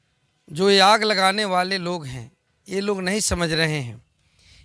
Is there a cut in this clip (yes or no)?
no